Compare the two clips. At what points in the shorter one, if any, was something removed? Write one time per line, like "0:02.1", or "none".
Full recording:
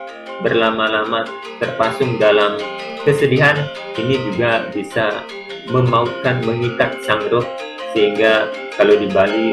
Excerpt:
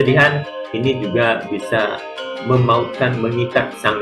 none